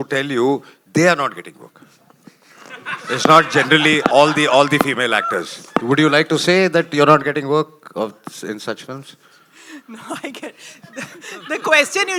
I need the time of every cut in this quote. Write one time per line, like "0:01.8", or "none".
none

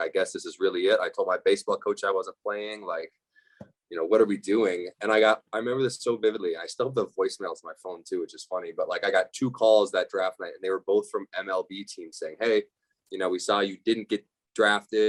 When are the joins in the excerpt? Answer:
none

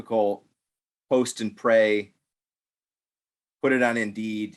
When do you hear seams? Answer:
none

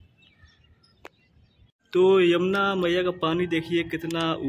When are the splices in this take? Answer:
0:01.7

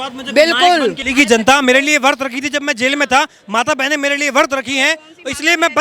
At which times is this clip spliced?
0:01.0

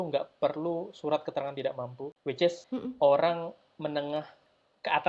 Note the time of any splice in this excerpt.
0:02.1
0:02.6

